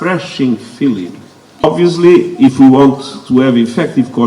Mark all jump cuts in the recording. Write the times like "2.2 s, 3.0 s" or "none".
1.6 s